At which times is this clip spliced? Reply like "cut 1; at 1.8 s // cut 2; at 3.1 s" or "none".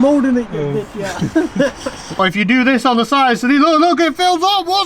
cut 1; at 2.2 s